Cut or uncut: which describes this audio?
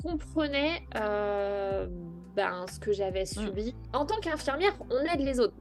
cut